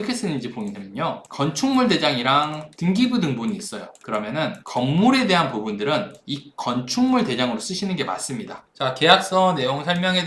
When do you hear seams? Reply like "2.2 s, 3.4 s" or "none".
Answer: 8.5 s